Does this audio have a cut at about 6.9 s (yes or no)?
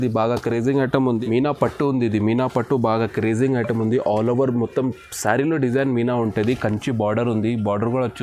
no